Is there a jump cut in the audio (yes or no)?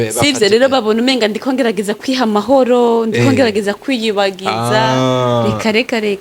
no